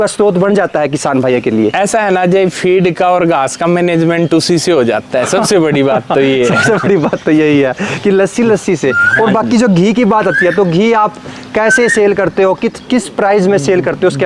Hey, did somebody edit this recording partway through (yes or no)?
no